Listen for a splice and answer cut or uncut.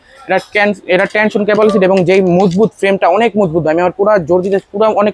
uncut